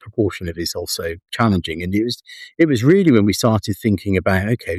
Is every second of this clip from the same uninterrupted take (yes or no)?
yes